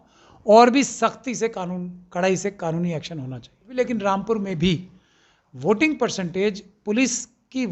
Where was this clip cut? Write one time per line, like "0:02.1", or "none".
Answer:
0:03.6